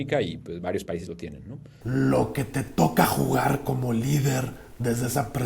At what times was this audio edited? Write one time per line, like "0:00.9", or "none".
0:01.8